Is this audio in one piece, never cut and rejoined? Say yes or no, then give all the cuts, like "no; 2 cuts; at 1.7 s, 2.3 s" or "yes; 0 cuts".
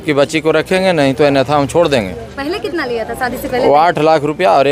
yes; 0 cuts